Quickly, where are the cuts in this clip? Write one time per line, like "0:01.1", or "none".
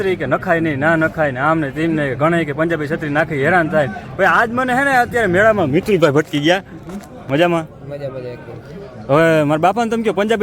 none